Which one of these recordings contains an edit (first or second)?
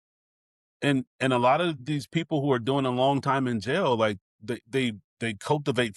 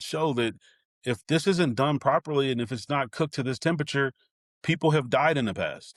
first